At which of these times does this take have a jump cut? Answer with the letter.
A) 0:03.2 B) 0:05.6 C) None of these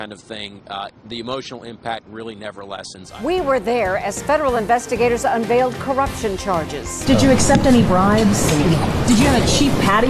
A